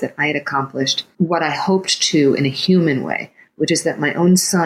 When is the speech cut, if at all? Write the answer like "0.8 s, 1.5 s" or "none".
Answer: 1.0 s